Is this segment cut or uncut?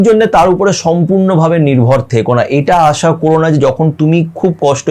uncut